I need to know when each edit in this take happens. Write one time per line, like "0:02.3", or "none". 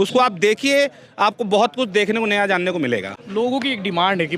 none